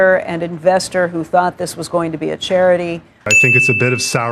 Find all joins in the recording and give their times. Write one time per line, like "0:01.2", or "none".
0:03.3